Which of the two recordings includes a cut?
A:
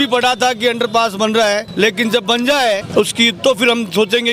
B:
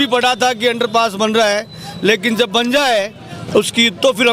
A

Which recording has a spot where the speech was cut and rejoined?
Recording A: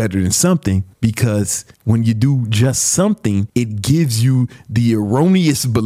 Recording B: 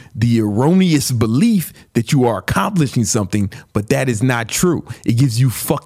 A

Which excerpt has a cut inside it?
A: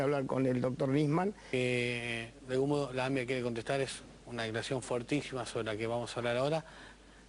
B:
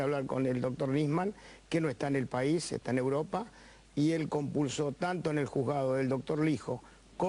B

